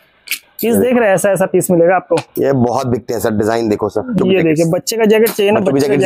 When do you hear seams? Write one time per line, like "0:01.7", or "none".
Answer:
0:04.1